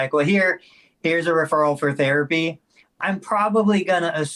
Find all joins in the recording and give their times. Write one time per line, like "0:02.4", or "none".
none